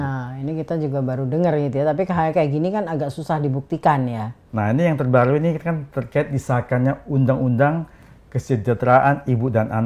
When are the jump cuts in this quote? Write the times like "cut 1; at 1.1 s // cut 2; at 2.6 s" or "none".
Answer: cut 1; at 4.3 s